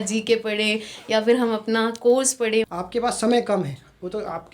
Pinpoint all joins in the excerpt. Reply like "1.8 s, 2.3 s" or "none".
2.7 s